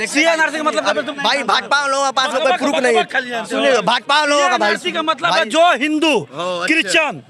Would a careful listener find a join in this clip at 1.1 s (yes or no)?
yes